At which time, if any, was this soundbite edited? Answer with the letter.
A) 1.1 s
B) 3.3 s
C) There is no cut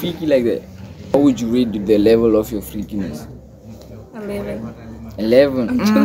A